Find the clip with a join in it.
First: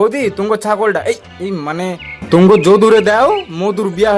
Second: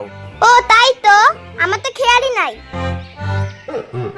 second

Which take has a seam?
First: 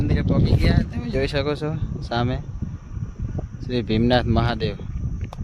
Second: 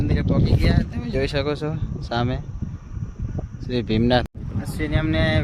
second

